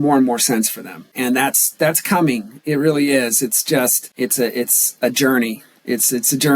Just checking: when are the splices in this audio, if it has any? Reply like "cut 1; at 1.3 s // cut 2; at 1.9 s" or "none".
cut 1; at 1.1 s // cut 2; at 4.1 s